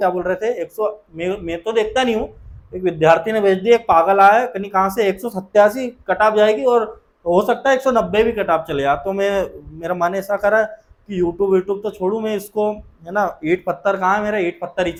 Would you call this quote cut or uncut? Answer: uncut